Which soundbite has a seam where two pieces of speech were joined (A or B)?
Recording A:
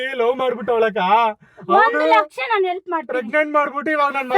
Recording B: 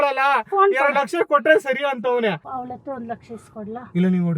B